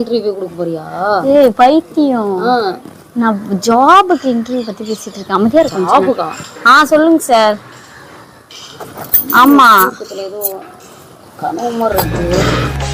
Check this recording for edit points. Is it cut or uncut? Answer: uncut